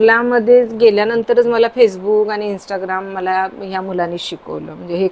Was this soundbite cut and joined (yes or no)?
no